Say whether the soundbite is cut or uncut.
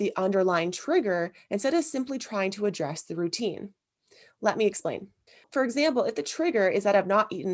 cut